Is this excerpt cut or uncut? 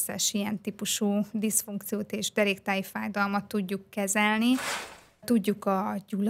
cut